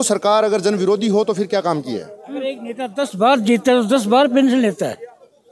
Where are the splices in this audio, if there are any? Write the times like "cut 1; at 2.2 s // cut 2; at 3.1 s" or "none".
cut 1; at 2.2 s